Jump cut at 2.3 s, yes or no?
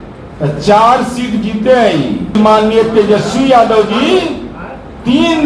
yes